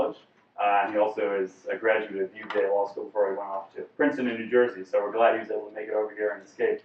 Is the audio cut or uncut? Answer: cut